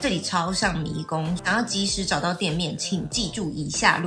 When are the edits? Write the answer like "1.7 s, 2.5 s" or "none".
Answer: 1.4 s